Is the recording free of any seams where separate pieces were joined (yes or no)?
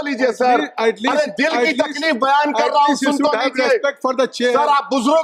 yes